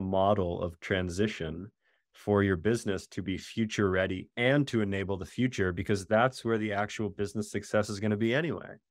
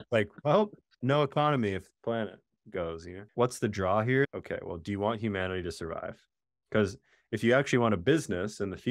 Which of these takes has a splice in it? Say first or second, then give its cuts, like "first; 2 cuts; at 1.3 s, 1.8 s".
second; 1 cut; at 3.2 s